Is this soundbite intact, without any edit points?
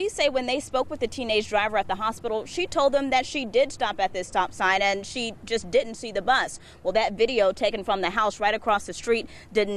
yes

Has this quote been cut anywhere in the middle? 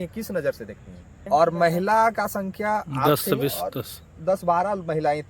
yes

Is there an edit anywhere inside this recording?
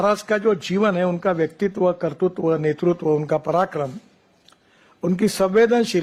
no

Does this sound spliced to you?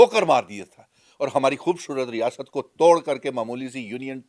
no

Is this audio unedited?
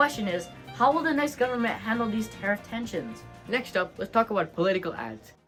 yes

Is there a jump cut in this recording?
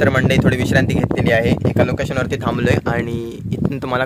no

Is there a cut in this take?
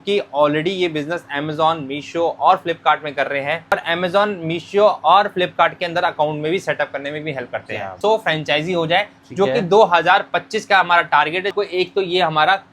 yes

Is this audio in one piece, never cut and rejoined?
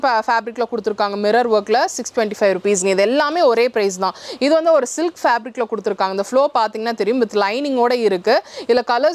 yes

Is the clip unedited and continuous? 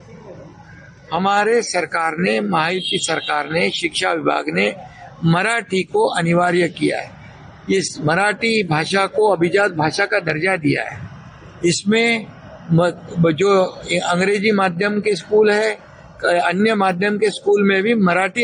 yes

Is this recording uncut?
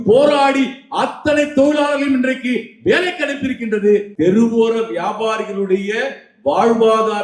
no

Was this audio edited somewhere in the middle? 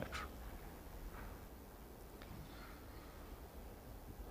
yes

